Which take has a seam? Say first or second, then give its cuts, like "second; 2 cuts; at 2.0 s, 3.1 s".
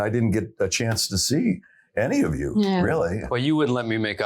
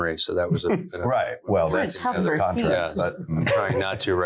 first; 1 cut; at 3.2 s